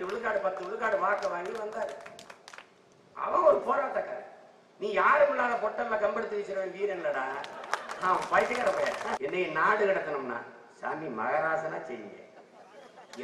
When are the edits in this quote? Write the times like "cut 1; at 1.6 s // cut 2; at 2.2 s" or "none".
cut 1; at 9.2 s